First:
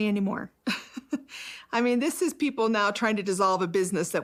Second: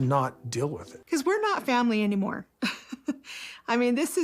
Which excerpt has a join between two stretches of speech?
second; 1 cut; at 0.9 s

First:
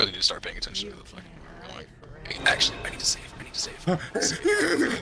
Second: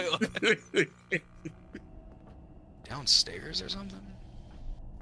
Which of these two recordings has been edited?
second; 1 cut; at 1.6 s

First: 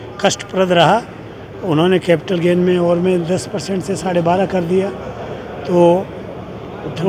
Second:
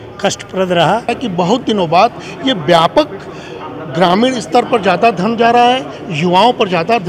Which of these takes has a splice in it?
second; 1 cut; at 1.2 s

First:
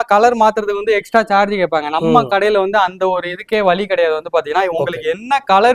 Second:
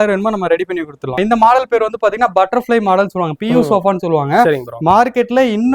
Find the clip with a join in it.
second; 1 cut; at 1.2 s

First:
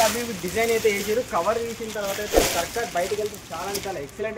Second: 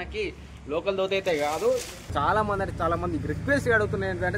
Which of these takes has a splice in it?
second; 1 cut; at 2.0 s

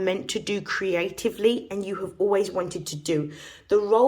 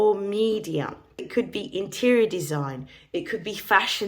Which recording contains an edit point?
second; 1 cut; at 1.3 s

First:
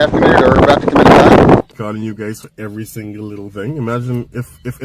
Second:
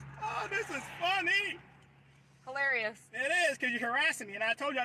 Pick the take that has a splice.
first; 1 cut; at 1.6 s

